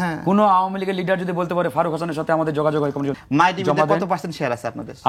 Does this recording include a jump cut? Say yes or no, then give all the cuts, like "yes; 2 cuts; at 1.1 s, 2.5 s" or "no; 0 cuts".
yes; 1 cut; at 3.2 s